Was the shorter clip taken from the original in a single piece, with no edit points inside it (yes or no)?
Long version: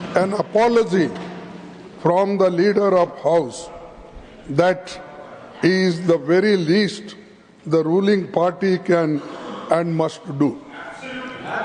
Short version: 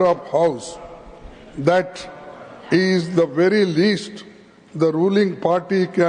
yes